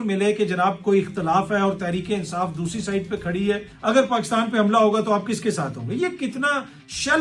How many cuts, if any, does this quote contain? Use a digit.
1